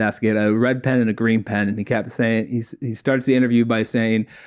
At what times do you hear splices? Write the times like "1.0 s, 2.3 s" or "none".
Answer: none

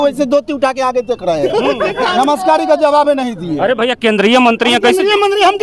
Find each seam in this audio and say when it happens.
none

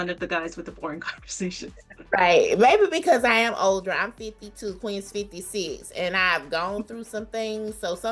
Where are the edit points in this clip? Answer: none

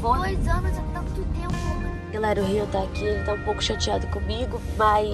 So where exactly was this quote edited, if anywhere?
2.0 s

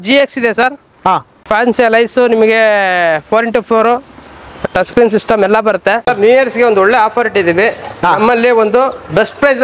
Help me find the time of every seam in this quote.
1.5 s, 6.1 s

